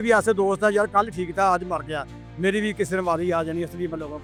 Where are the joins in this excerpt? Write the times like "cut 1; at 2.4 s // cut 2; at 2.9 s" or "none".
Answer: none